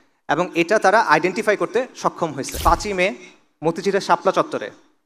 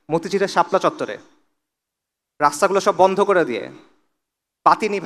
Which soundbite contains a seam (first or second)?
first